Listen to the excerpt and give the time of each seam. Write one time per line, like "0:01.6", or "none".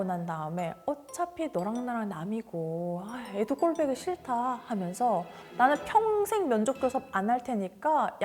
none